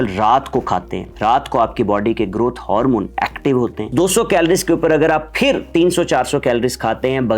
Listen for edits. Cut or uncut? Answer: cut